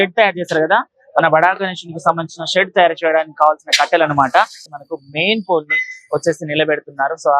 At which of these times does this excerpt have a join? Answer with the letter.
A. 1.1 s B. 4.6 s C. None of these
B